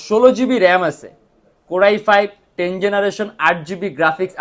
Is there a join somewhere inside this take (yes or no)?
no